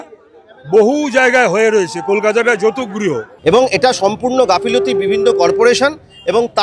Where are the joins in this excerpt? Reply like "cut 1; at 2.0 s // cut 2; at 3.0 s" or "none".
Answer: cut 1; at 3.3 s